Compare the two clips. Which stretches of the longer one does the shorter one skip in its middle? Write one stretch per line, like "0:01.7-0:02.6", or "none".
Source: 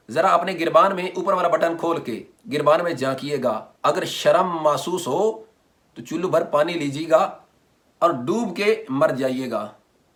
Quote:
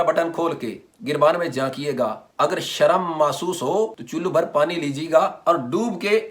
0:05.5-0:06.0
0:07.3-0:07.9